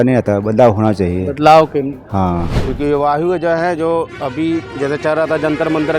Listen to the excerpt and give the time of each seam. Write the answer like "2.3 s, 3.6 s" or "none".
2.6 s